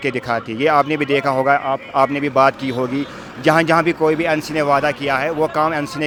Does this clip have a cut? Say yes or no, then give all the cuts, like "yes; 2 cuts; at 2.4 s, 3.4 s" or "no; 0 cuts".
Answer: no; 0 cuts